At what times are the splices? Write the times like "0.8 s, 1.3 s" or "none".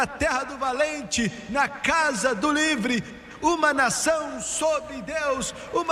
none